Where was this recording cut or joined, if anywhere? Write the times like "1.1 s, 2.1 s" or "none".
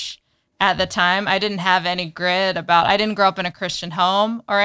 none